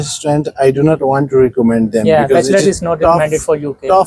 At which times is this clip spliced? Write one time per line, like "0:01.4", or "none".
none